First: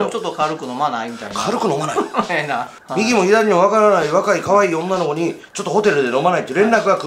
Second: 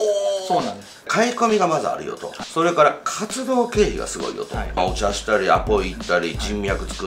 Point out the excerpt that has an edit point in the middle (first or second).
second